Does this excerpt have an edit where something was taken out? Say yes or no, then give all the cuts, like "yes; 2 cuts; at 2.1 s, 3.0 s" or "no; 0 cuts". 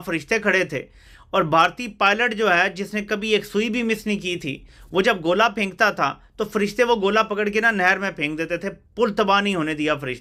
no; 0 cuts